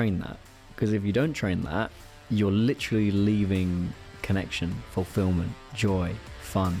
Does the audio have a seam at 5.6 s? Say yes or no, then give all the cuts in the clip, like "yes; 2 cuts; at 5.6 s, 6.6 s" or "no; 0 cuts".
no; 1 cut; at 4.1 s